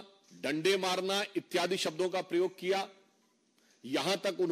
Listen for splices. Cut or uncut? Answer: uncut